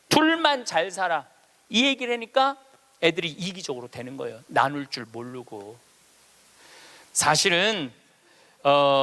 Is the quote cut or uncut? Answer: cut